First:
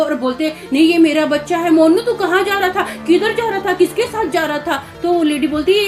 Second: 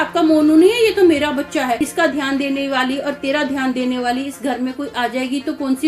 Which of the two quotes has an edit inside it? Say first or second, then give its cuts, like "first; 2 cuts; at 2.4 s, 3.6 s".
second; 1 cut; at 1.9 s